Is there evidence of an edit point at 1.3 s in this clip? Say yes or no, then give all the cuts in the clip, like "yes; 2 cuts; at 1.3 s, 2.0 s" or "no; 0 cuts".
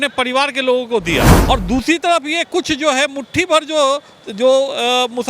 yes; 1 cut; at 1.3 s